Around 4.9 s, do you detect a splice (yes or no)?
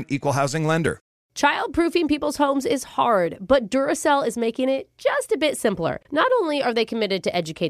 no